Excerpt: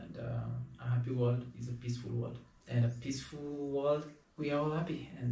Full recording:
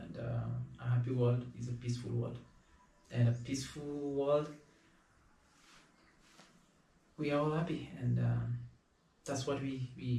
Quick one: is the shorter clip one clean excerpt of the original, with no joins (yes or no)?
no